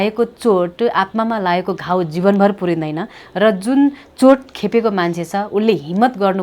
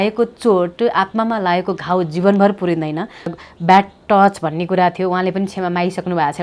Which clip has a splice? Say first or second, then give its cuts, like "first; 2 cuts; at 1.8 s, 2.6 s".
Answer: second; 1 cut; at 3.3 s